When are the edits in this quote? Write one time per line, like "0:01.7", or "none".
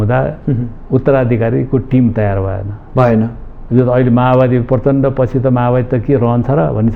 none